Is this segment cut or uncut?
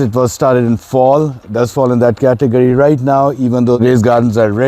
cut